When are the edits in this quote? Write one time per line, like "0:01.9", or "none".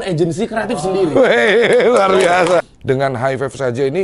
0:02.7